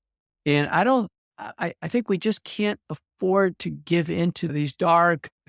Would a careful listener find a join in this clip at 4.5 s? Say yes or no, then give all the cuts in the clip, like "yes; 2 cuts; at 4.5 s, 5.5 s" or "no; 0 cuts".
yes; 1 cut; at 4.5 s